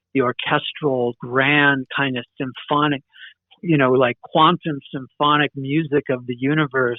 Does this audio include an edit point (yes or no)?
no